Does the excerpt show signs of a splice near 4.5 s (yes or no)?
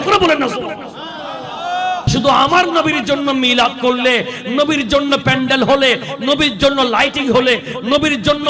no